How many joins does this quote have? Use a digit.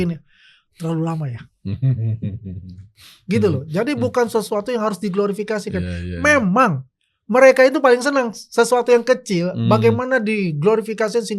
0